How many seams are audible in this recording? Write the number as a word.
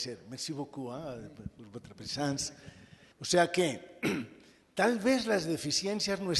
zero